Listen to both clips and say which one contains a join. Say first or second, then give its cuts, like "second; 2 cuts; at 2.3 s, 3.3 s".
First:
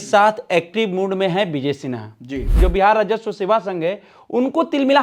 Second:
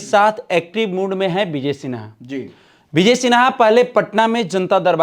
first; 1 cut; at 2.5 s